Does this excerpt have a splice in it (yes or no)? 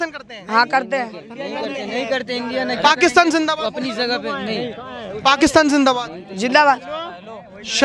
no